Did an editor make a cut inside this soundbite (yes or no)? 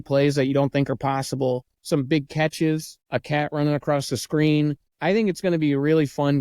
yes